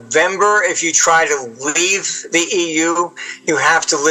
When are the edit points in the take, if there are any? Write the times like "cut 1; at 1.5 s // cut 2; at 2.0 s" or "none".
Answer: none